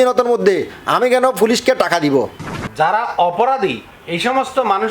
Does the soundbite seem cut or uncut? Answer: cut